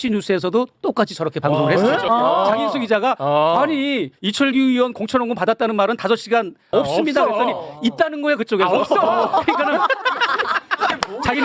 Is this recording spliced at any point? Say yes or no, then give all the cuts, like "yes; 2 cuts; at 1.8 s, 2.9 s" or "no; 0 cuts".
yes; 2 cuts; at 2.0 s, 6.7 s